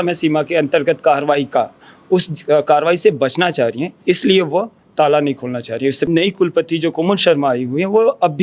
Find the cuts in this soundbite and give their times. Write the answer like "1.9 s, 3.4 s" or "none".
6.1 s